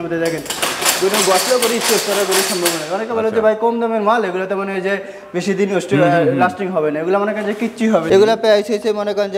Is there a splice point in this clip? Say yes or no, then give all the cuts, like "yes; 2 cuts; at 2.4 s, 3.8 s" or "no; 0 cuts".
yes; 1 cut; at 8.1 s